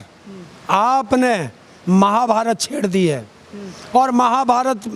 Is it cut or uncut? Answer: uncut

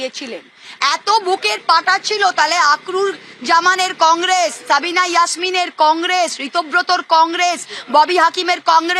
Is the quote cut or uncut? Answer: uncut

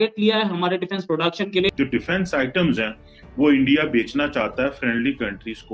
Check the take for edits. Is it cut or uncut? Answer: cut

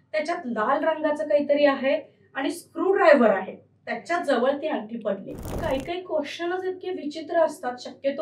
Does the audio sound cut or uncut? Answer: cut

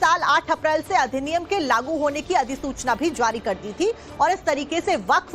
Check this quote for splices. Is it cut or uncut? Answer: cut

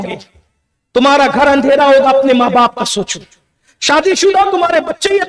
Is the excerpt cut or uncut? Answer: uncut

